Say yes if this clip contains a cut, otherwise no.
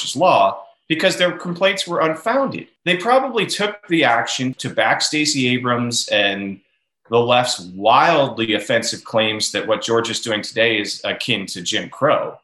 yes